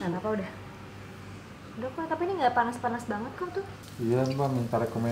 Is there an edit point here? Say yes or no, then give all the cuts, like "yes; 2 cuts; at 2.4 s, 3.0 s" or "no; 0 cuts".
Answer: yes; 1 cut; at 3.8 s